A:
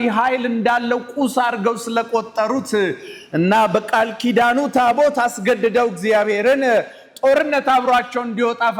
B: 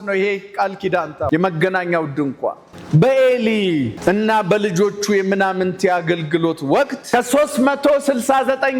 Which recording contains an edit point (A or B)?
B